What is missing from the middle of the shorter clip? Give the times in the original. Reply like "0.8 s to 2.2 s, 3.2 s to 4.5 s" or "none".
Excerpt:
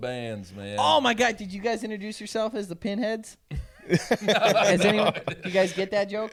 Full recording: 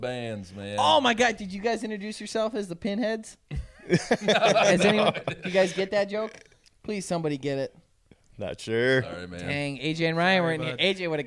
none